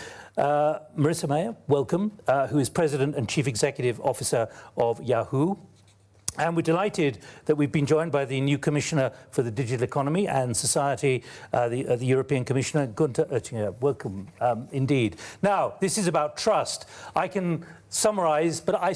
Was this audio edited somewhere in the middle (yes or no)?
yes